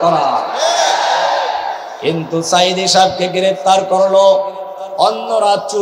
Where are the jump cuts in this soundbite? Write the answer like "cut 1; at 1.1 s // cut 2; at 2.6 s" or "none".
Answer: none